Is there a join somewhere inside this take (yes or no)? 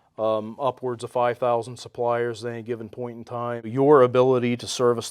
yes